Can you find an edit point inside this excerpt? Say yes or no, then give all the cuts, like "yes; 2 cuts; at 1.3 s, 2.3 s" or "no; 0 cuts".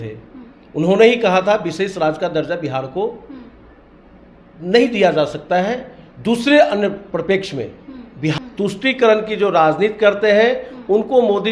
yes; 1 cut; at 8.4 s